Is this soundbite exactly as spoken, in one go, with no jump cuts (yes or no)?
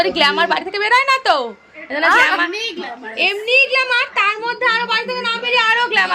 yes